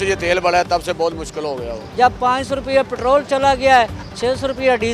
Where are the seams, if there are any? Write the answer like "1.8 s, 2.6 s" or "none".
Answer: 1.8 s